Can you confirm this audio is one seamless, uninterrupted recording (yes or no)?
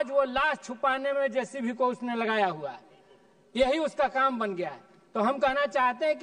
yes